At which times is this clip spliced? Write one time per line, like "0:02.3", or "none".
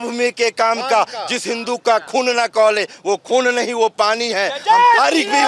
none